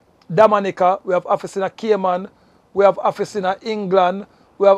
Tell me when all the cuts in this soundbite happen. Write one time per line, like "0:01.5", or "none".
none